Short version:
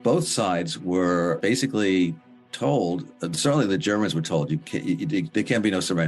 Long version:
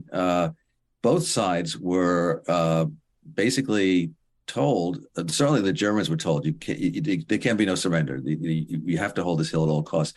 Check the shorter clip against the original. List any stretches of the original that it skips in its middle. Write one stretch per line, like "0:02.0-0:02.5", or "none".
0:02.4-0:03.3